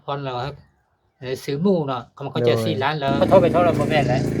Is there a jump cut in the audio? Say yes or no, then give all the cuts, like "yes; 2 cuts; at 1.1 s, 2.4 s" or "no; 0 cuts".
yes; 1 cut; at 3.1 s